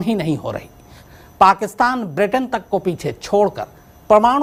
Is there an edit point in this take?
no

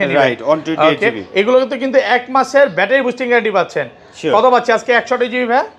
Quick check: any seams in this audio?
no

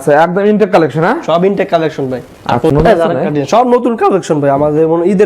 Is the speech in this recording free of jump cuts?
no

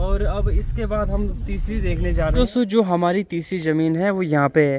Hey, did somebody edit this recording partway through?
yes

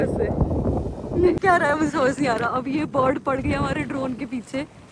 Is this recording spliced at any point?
yes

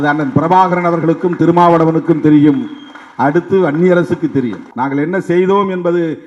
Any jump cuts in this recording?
yes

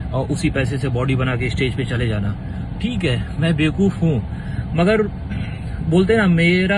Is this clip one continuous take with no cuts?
yes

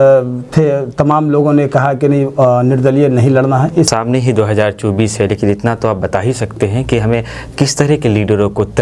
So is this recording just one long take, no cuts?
no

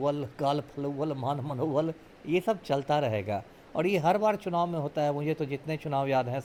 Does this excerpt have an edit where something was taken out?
no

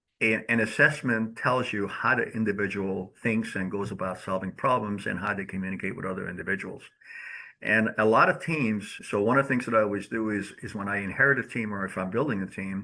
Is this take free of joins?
no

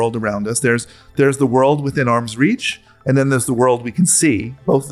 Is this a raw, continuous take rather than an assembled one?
yes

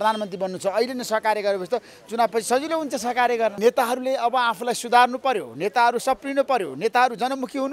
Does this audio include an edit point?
yes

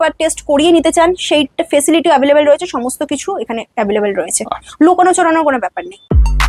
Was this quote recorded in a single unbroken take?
yes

